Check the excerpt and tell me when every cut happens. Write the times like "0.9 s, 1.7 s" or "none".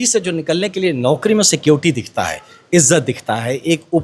none